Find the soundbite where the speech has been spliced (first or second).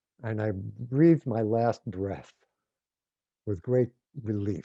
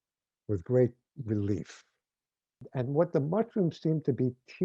second